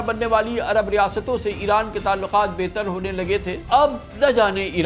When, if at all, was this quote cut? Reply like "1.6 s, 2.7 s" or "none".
3.6 s